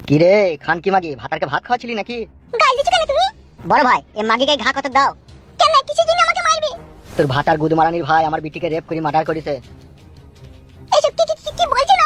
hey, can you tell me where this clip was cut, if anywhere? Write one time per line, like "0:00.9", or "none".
none

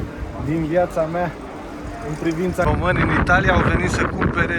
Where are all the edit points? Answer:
0:02.7

